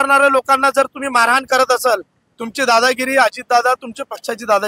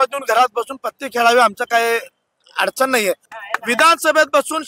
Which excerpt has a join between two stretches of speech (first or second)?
second